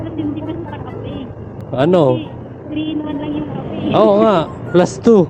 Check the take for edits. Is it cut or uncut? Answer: uncut